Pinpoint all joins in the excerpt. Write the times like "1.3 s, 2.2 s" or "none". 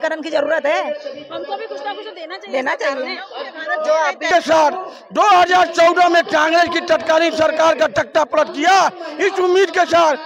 4.3 s

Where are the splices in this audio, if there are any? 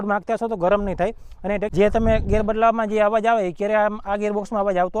1.7 s

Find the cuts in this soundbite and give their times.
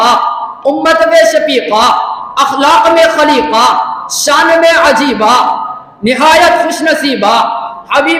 none

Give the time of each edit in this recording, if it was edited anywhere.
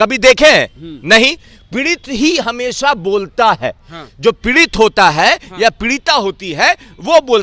none

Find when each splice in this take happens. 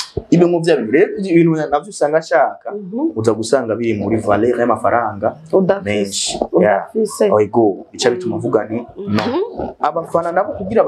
9.3 s

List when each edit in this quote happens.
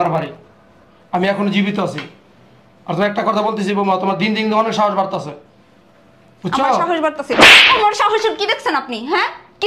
none

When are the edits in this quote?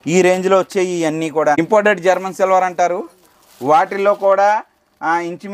1.6 s

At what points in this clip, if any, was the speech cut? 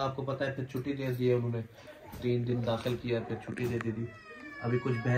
none

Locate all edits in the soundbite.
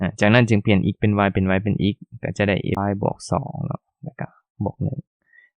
2.8 s

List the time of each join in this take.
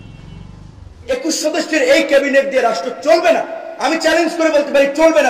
1.0 s

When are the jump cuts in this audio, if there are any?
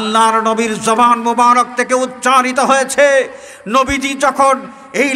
none

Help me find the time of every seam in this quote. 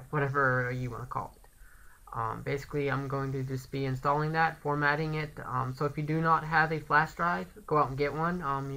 4.9 s

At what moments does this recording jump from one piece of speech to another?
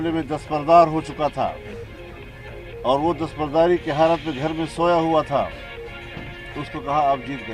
none

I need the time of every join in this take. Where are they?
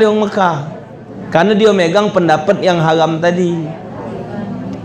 none

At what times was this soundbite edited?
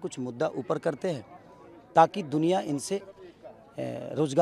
none

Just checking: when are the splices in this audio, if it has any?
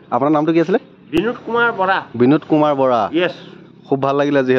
1.2 s

